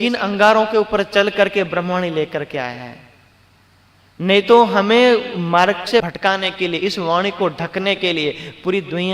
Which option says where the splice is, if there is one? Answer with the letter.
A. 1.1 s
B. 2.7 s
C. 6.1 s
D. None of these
C